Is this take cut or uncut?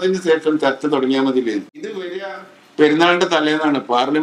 cut